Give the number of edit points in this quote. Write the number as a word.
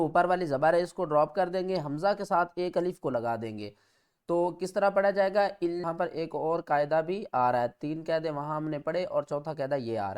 one